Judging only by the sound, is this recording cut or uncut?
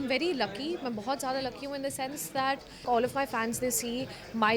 cut